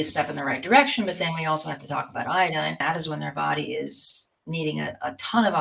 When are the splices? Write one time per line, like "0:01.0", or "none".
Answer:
0:02.8